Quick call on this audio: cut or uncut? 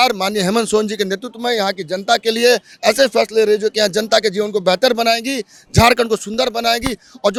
uncut